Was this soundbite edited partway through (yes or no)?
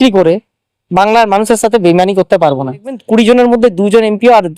yes